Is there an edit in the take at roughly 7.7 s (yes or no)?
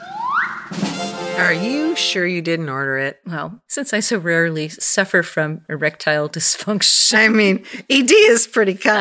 no